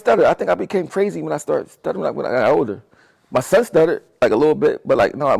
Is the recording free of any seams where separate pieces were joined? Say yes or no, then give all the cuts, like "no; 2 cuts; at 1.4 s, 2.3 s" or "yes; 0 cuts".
yes; 0 cuts